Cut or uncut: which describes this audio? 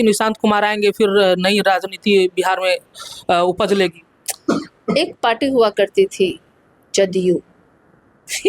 uncut